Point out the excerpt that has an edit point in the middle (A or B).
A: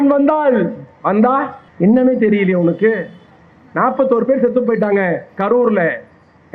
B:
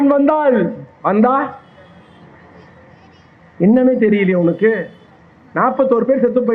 A